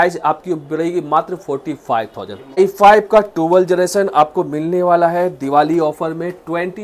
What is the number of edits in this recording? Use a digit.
1